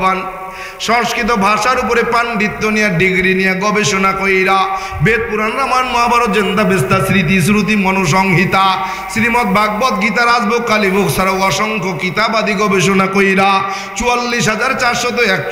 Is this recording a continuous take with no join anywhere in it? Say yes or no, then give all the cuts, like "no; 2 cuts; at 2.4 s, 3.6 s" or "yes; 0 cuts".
yes; 0 cuts